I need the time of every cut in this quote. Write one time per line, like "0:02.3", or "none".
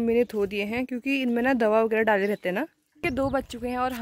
0:03.0